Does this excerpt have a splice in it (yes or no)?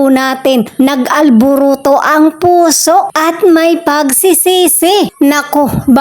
yes